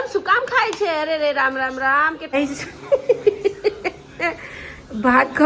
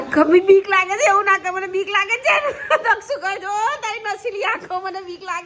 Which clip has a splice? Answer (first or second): first